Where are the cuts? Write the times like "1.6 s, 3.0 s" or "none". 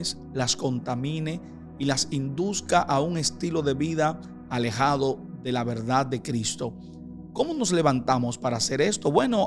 none